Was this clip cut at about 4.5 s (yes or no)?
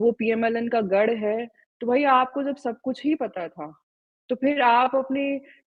no